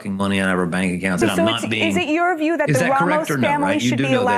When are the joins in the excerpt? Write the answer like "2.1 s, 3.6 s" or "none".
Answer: 1.2 s